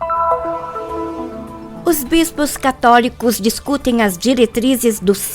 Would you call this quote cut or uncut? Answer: cut